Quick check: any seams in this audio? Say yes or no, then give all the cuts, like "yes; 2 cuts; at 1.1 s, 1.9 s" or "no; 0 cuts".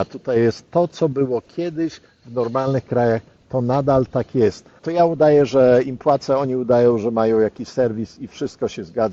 yes; 1 cut; at 4.8 s